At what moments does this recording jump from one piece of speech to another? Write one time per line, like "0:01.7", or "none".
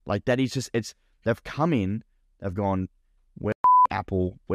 none